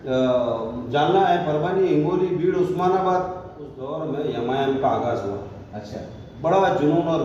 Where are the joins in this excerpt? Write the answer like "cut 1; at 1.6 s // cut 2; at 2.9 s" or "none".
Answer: cut 1; at 3.9 s